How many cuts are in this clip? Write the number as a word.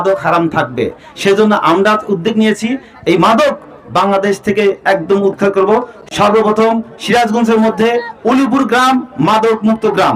one